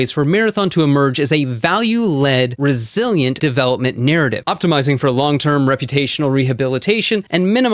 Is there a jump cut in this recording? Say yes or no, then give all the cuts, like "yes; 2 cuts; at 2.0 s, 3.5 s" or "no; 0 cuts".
yes; 1 cut; at 3.4 s